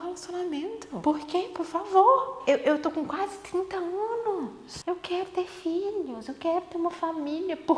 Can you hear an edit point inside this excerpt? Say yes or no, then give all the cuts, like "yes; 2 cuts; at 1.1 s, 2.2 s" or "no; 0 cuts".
yes; 3 cuts; at 0.9 s, 2.3 s, 4.7 s